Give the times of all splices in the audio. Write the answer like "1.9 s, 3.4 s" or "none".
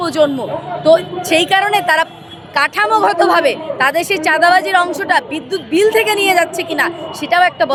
none